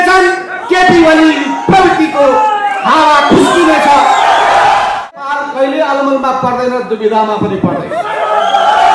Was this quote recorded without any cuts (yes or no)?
no